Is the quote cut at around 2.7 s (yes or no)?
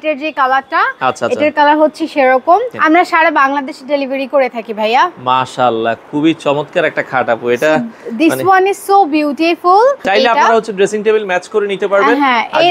yes